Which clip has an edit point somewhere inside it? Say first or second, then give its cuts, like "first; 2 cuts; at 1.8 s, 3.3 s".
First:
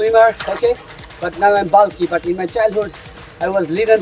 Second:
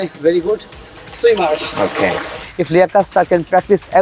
second; 1 cut; at 2.4 s